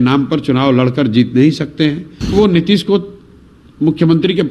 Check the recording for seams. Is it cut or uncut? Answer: cut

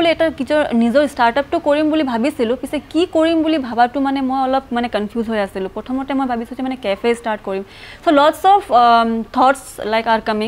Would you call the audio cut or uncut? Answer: uncut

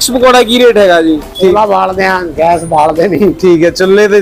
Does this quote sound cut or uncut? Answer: cut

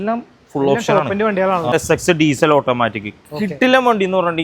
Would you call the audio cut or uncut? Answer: cut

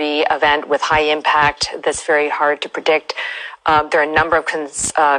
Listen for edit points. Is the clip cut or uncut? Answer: cut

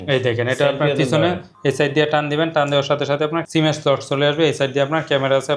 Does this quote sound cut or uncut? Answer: cut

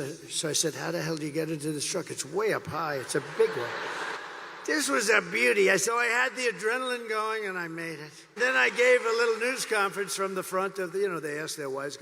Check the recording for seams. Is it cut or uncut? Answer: cut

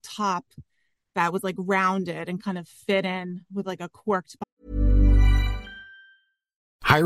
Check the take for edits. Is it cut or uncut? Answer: cut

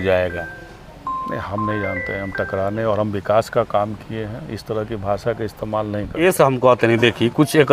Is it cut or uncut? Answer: cut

